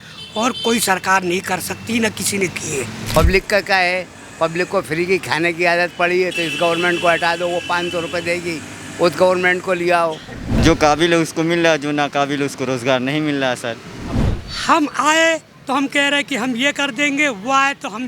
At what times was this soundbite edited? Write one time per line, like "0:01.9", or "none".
0:03.0
0:10.5
0:14.2